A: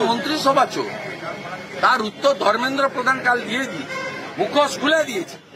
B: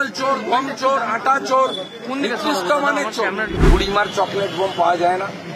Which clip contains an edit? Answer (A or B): B